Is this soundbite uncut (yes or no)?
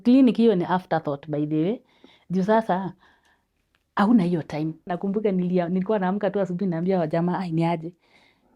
no